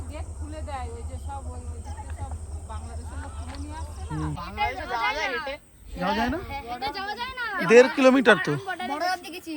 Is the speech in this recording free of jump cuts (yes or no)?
no